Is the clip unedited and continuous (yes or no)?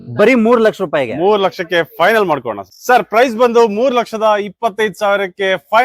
no